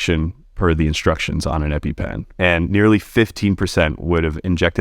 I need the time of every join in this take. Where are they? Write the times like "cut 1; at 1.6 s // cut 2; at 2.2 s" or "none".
cut 1; at 2.2 s // cut 2; at 3.3 s